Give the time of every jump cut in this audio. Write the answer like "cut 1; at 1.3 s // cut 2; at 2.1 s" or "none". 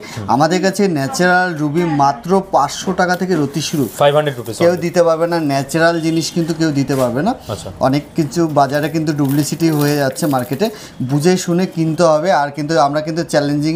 none